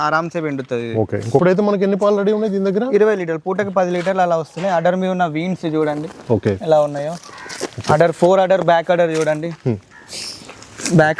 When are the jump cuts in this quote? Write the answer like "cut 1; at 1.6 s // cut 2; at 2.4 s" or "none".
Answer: cut 1; at 1.4 s